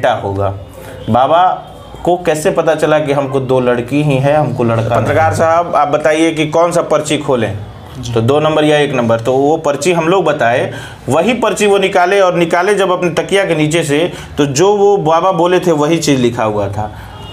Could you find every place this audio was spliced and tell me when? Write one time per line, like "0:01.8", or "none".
0:05.0